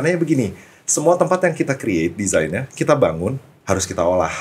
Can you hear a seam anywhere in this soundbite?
yes; 1 cut; at 3.5 s

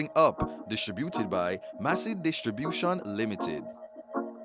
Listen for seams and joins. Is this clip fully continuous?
yes; 0 cuts

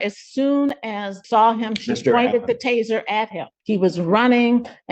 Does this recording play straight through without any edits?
no; 2 cuts; at 1.2 s, 3.5 s

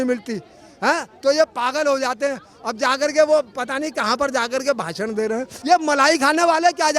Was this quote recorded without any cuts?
no; 1 cut; at 5.5 s

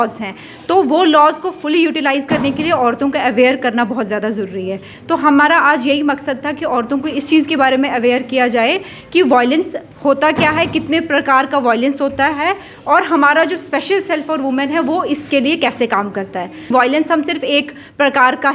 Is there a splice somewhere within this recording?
yes; 2 cuts; at 4.9 s, 16.7 s

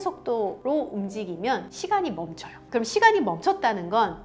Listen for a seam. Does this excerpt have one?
yes; 1 cut; at 2.6 s

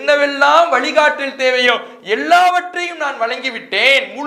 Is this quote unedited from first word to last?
yes; 0 cuts

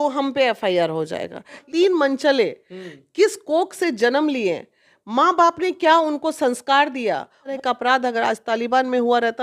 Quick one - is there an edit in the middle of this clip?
yes; 2 cuts; at 1.6 s, 7.5 s

